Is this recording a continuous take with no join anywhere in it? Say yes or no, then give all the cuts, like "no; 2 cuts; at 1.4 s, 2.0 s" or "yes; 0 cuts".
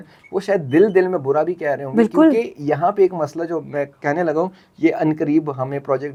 yes; 0 cuts